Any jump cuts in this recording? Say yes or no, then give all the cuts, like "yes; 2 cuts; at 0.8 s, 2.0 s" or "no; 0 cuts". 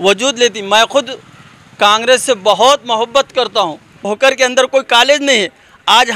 yes; 1 cut; at 4.0 s